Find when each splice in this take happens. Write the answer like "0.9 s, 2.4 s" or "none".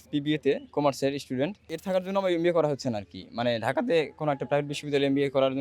1.7 s